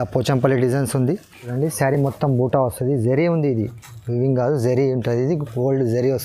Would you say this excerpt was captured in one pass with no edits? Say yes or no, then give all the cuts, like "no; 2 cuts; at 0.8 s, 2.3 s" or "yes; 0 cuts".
no; 1 cut; at 1.4 s